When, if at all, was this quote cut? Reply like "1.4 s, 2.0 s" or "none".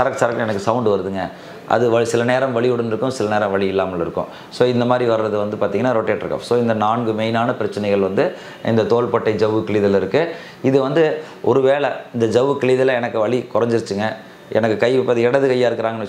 none